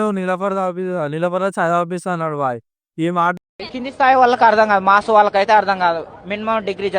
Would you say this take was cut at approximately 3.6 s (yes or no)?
yes